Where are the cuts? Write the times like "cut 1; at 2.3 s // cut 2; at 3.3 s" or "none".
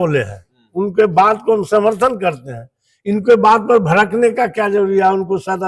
none